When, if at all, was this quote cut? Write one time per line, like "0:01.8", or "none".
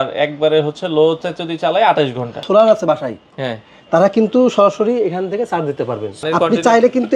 0:02.4
0:06.2